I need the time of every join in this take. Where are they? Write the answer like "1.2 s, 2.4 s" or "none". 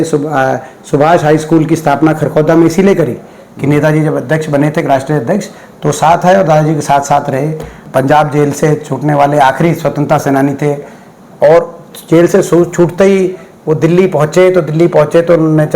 7.8 s